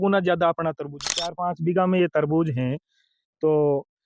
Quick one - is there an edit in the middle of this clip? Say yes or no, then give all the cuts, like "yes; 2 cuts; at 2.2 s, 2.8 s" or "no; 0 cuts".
yes; 1 cut; at 1.3 s